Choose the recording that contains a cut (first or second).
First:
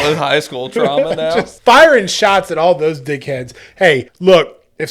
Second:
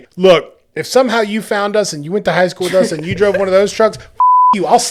first